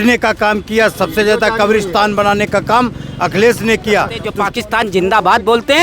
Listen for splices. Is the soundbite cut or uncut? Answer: cut